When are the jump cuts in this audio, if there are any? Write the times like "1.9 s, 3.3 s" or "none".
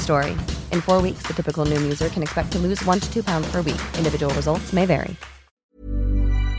5.6 s